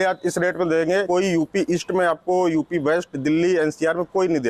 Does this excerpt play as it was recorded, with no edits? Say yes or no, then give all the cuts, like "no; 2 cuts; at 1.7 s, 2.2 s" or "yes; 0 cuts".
no; 1 cut; at 1.1 s